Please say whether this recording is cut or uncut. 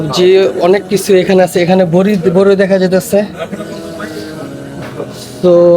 uncut